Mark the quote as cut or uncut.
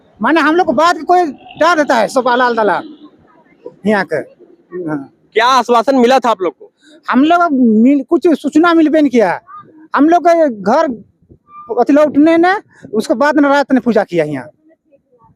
uncut